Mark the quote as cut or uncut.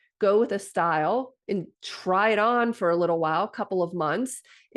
uncut